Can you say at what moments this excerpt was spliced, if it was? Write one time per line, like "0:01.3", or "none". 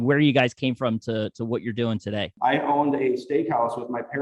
0:02.3